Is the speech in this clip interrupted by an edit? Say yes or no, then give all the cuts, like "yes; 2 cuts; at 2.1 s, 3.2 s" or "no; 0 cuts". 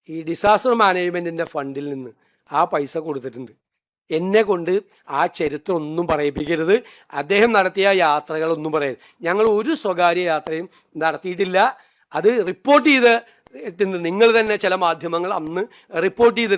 no; 0 cuts